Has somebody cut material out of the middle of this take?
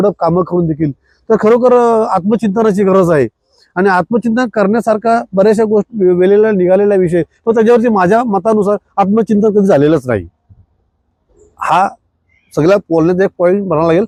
no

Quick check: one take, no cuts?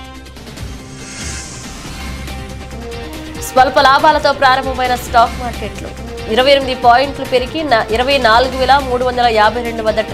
no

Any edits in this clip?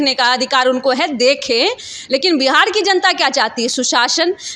no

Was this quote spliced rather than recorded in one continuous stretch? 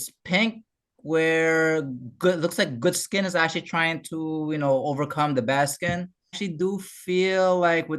yes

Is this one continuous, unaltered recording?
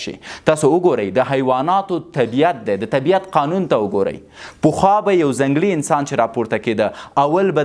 yes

